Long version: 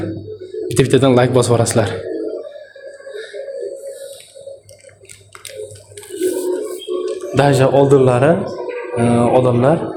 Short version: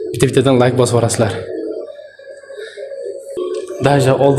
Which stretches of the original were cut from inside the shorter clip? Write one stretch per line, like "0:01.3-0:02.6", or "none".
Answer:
0:03.9-0:06.8